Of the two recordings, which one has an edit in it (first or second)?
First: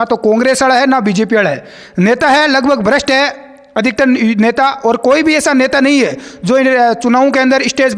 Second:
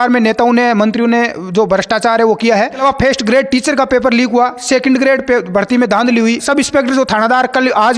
second